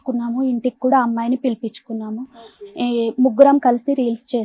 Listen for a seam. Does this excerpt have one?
no; 0 cuts

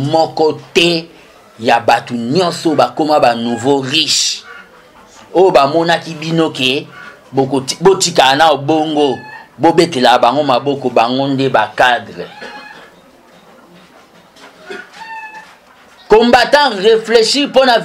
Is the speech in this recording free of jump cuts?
yes; 0 cuts

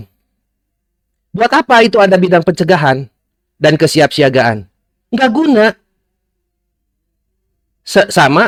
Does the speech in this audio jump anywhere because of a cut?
no; 0 cuts

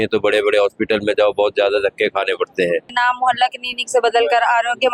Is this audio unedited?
no; 1 cut; at 2.9 s

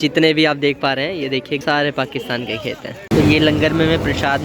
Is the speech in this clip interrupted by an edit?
yes; 2 cuts; at 1.6 s, 2.9 s

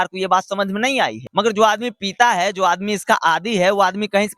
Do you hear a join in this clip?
yes; 1 cut; at 1.2 s

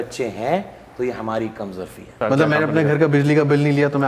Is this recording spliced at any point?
yes; 1 cut; at 2.1 s

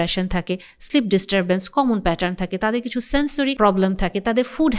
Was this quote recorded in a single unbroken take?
no; 1 cut; at 3.6 s

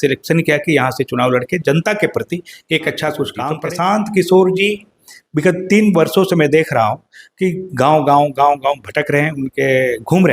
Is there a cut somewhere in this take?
yes; 1 cut; at 3.5 s

